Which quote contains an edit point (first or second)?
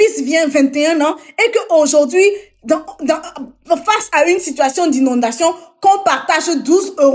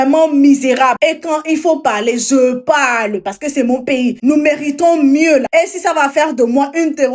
second